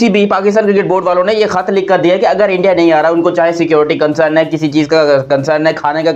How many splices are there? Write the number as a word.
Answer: zero